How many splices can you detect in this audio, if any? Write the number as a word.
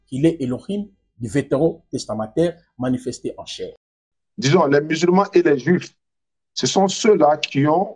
one